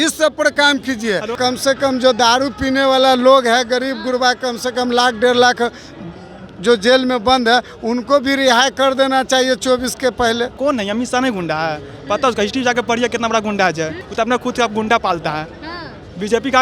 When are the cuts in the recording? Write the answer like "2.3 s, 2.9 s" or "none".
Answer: 1.3 s, 10.6 s, 14.0 s

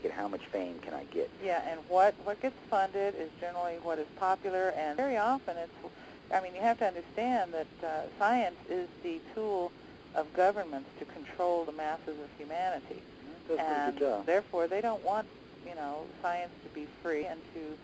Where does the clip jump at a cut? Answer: none

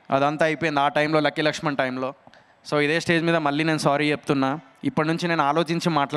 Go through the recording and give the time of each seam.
none

